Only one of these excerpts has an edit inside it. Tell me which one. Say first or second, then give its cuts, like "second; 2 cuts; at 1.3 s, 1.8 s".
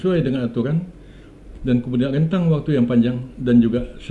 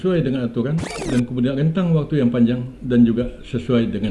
second; 1 cut; at 0.9 s